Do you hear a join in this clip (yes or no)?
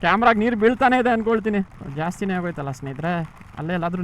yes